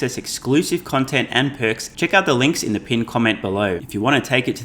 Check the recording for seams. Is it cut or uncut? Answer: cut